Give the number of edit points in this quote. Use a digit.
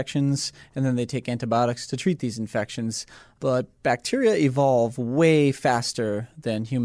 0